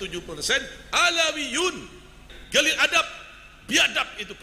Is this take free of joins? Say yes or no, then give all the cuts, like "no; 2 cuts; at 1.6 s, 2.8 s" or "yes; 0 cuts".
no; 1 cut; at 2.3 s